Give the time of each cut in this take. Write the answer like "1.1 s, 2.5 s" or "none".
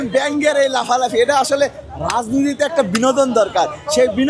none